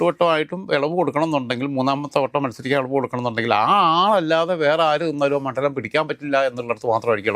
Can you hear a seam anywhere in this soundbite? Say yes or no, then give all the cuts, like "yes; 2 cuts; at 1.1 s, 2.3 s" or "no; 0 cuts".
no; 0 cuts